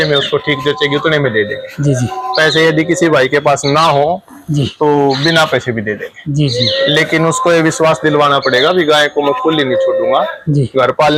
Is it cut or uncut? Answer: uncut